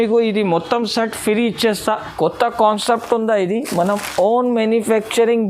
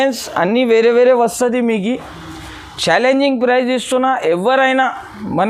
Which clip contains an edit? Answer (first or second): first